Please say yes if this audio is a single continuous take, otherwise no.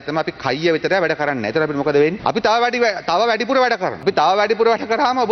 no